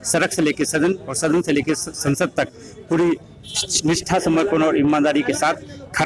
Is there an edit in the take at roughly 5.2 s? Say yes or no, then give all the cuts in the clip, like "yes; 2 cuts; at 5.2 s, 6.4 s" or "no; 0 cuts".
no; 0 cuts